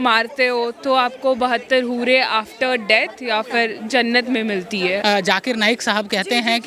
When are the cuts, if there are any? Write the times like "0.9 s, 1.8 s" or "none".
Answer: 5.0 s